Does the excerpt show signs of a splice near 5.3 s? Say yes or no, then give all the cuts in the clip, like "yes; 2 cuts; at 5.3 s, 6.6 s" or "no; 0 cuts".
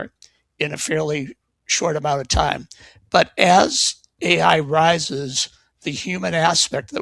no; 0 cuts